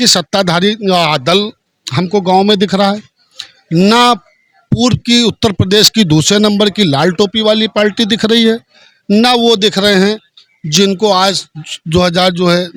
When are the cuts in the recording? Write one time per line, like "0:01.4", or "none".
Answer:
none